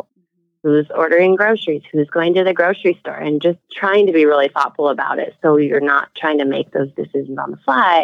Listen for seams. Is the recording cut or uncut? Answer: cut